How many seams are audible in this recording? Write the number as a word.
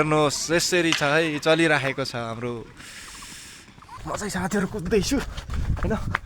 one